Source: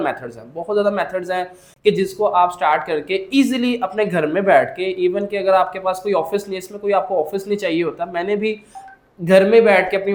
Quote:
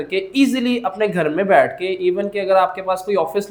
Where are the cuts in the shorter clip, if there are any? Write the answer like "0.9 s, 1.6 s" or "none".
none

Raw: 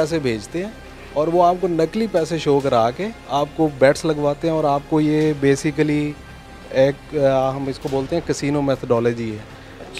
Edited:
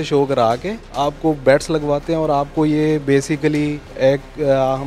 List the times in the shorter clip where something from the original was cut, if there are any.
3.8 s

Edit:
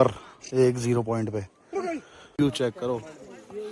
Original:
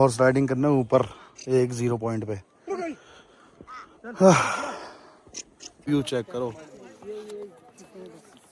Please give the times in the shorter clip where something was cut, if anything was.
2.4 s

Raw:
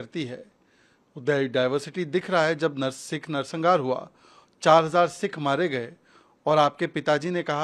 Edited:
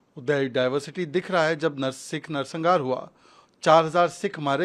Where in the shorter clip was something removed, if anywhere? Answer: none

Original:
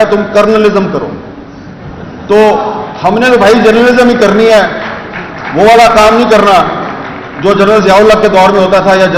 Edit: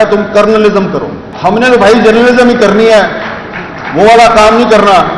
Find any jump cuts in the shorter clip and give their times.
1.2 s

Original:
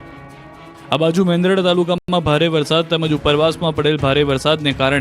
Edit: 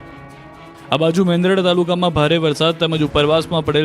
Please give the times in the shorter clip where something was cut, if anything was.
2.0 s

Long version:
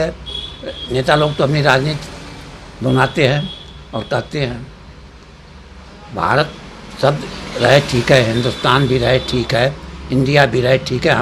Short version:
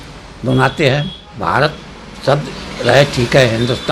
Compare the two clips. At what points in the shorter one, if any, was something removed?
1.2 s

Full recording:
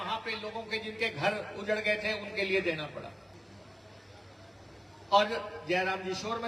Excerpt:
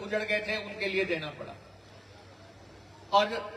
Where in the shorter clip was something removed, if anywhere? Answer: 1.8 s

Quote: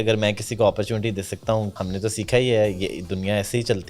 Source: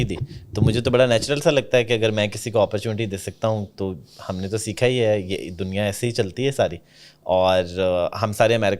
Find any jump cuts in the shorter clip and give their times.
1.7 s

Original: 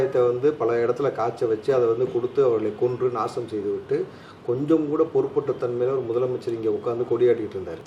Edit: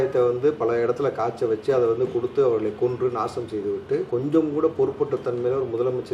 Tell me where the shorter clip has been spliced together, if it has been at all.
4.1 s

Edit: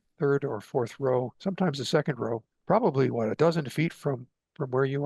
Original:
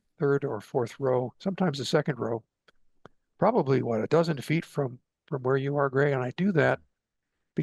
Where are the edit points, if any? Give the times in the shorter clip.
2.5 s

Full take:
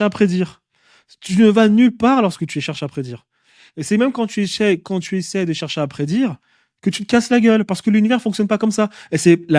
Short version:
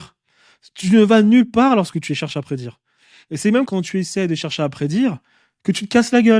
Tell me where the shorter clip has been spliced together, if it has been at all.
3.7 s

